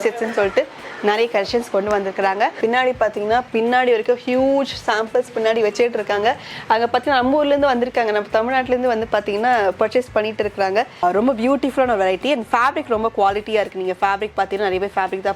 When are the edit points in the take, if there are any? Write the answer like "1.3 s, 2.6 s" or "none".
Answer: 2.6 s, 11.0 s